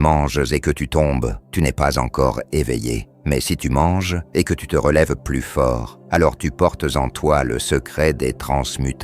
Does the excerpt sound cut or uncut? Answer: cut